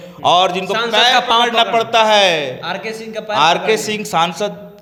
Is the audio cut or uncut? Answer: uncut